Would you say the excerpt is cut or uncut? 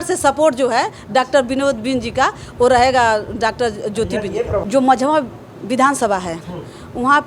cut